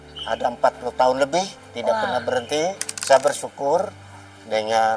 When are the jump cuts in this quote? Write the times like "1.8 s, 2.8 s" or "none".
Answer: 2.8 s